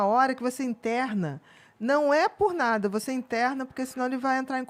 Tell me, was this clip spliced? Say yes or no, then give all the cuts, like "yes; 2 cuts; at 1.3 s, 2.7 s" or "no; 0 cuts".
no; 0 cuts